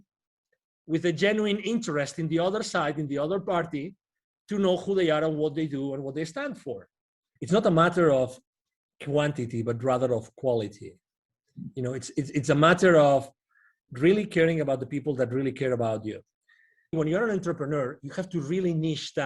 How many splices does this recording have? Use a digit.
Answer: 2